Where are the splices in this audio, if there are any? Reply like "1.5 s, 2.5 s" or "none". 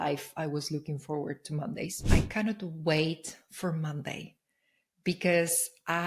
1.9 s